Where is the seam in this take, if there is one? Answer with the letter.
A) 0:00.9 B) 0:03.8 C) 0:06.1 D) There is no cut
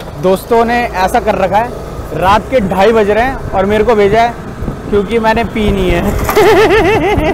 D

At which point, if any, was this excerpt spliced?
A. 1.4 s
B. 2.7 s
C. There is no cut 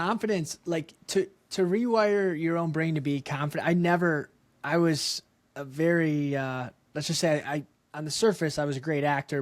A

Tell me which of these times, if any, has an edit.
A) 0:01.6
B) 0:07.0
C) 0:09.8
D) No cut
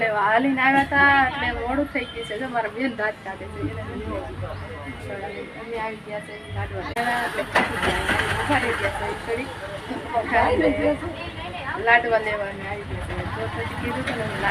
B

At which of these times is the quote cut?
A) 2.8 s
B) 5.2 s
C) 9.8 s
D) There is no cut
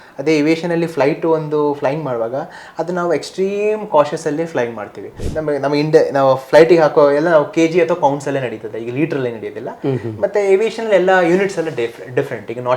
B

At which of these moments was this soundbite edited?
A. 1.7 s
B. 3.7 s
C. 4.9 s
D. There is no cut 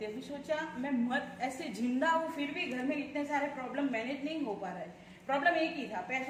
D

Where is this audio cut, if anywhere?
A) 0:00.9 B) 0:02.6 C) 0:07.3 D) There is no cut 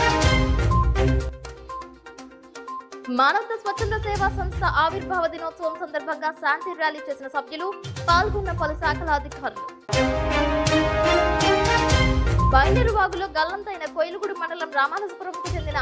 B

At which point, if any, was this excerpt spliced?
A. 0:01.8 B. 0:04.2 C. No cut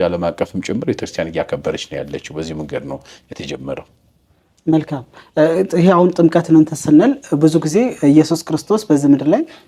C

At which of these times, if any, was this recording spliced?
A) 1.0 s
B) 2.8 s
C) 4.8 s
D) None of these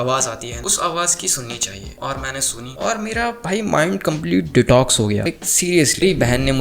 D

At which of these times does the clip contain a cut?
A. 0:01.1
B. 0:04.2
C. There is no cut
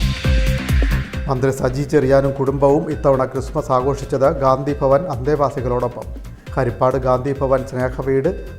C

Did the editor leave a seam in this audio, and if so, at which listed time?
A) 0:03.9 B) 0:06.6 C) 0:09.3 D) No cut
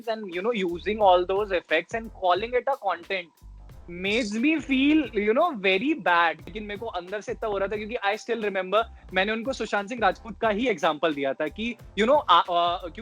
B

